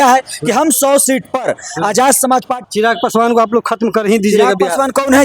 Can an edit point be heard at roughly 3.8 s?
no; 1 cut; at 2.6 s

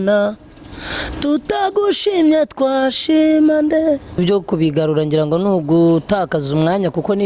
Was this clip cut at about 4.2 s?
yes; 1 cut; at 4.2 s

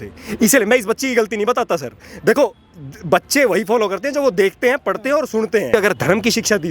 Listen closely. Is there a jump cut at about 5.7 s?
yes; 1 cut; at 5.7 s

